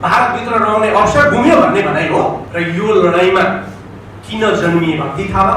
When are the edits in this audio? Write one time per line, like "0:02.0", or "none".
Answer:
0:02.5